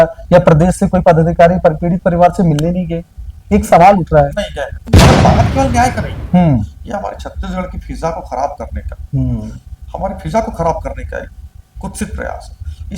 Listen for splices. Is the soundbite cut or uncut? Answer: cut